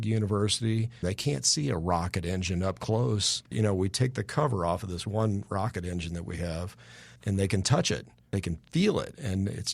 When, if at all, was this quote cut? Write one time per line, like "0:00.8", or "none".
0:01.0
0:03.5
0:07.2
0:08.2